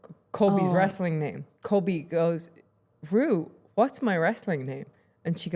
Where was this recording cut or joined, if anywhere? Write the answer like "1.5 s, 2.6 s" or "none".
1.5 s